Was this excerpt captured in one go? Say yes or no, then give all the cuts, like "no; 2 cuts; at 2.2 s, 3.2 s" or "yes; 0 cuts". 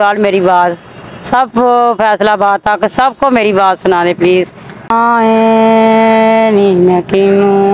no; 1 cut; at 4.9 s